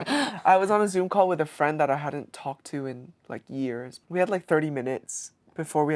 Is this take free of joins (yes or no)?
no